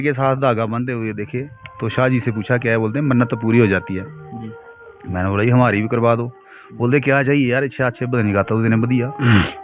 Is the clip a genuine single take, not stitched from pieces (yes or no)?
yes